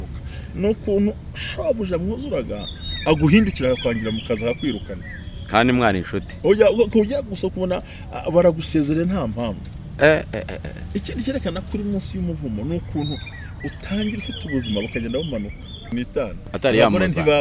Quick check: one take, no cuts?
no; 1 cut; at 15.8 s

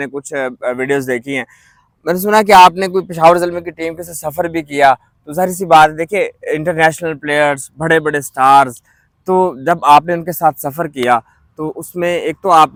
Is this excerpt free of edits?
yes; 0 cuts

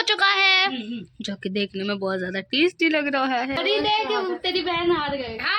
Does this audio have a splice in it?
yes; 1 cut; at 3.6 s

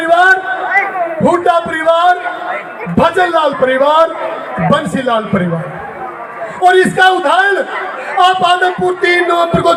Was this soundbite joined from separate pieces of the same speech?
no; 0 cuts

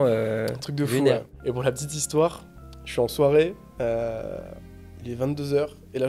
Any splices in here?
yes; 1 cut; at 1.3 s

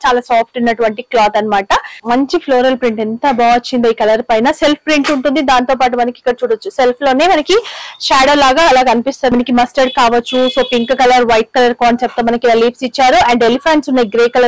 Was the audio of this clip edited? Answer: yes; 2 cuts; at 1.9 s, 9.3 s

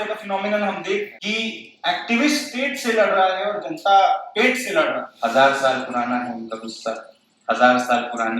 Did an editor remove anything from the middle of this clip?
yes; 2 cuts; at 1.2 s, 5.1 s

